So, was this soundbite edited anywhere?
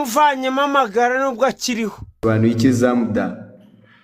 yes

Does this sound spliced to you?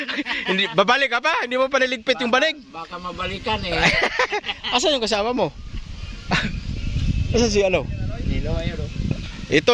no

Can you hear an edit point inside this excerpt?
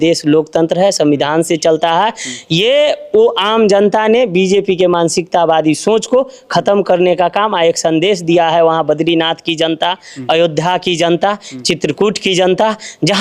no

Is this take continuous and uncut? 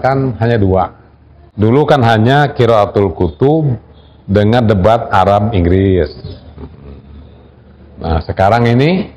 no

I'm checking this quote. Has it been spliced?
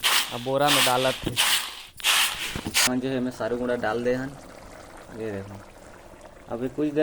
yes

